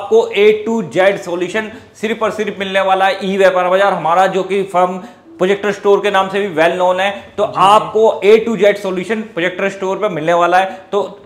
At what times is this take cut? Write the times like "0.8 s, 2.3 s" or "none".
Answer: none